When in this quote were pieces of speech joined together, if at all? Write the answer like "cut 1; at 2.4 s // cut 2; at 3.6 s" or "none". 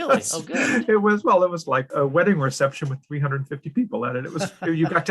cut 1; at 1.9 s